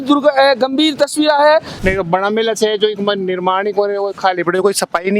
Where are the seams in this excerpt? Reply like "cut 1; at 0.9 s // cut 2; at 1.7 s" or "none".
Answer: cut 1; at 1.7 s